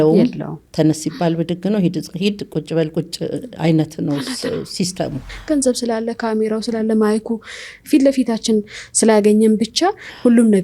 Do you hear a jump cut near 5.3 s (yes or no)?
yes